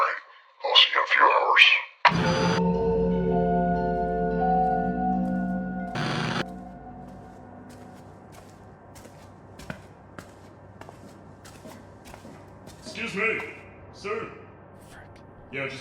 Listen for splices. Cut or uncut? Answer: uncut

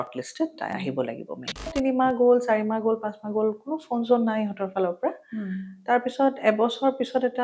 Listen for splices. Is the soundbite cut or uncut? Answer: cut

